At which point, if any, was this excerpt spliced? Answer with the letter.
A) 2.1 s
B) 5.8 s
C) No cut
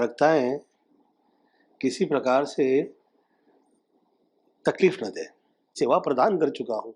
B